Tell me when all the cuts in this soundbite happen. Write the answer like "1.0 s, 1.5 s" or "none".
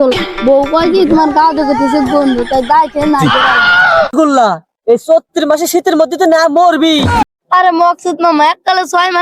4.1 s, 7.2 s